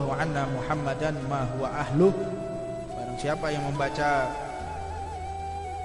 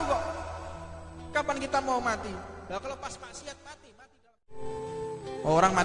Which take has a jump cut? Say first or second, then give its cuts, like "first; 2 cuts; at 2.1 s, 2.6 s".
second; 1 cut; at 4.6 s